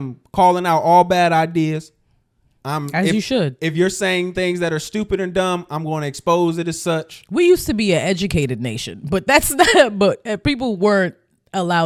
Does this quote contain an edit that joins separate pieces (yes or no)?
no